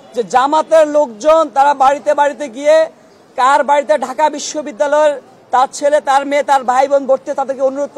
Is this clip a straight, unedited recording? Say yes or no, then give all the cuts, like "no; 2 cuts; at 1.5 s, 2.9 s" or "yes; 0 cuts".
yes; 0 cuts